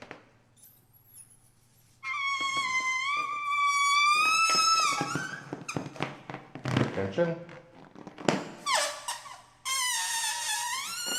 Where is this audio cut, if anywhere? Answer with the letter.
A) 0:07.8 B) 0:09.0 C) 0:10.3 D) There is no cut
D